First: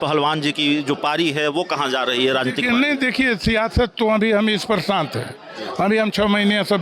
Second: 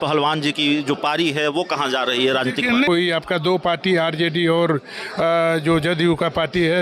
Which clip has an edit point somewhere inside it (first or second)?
second